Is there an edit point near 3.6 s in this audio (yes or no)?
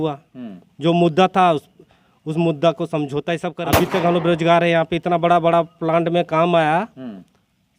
yes